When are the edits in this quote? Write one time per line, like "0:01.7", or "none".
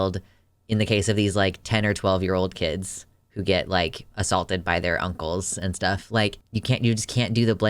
0:06.4